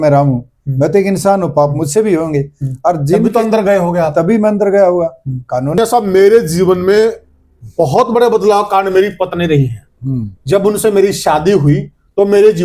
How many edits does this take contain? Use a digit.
1